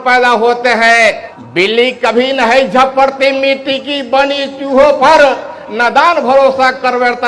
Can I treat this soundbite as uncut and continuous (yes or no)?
yes